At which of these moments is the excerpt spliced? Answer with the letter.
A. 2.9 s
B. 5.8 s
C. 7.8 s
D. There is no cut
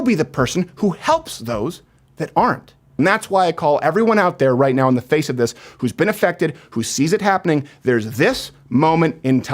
A